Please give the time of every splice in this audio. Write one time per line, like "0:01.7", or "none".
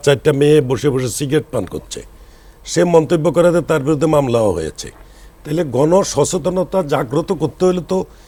none